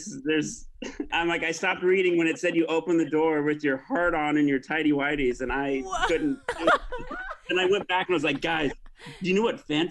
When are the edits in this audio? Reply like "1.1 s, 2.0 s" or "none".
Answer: 7.4 s